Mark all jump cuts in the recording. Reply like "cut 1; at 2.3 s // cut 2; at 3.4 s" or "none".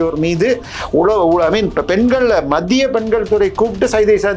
none